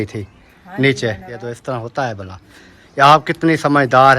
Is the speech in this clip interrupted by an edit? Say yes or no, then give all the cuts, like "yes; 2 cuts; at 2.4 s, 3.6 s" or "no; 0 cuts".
yes; 1 cut; at 1.4 s